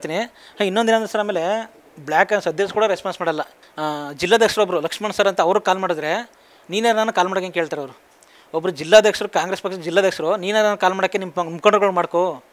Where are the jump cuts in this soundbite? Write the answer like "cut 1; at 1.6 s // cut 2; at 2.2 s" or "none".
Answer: none